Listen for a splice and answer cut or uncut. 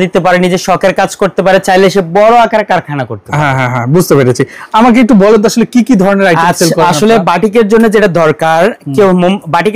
uncut